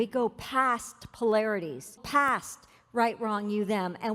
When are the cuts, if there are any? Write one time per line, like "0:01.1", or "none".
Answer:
0:01.9